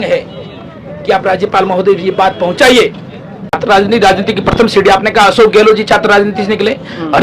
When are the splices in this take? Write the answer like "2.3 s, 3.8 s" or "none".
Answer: 3.6 s